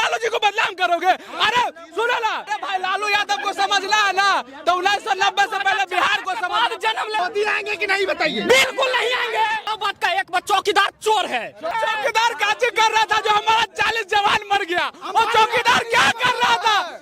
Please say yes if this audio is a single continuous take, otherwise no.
no